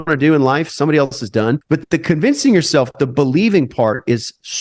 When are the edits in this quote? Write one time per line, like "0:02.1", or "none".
0:01.6